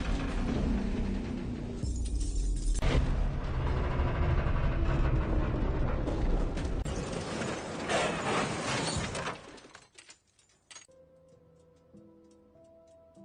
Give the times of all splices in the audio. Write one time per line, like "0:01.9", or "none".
none